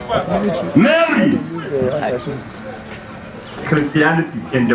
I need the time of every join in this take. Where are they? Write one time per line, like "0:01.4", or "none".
0:03.6

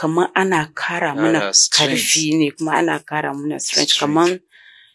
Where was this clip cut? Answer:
none

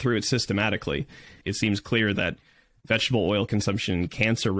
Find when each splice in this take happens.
0:01.4

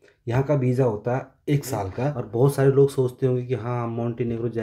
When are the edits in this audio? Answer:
0:02.2

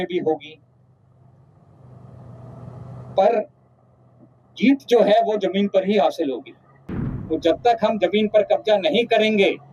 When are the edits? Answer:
0:07.1

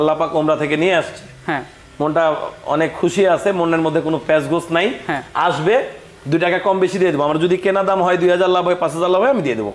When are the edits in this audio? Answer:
none

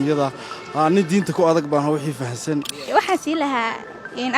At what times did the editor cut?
0:02.9

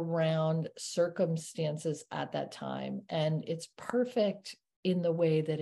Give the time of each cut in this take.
none

